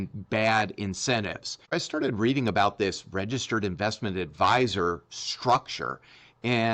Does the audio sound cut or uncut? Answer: cut